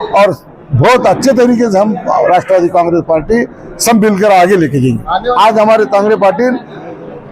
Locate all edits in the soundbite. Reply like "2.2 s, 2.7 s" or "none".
5.3 s